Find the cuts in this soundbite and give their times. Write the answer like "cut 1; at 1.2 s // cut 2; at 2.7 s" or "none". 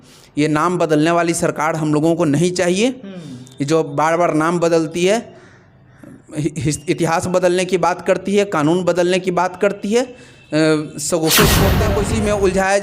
cut 1; at 11.8 s